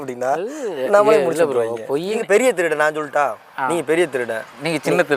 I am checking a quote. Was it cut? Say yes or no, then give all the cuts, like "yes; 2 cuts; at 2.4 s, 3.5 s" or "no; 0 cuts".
yes; 1 cut; at 2.2 s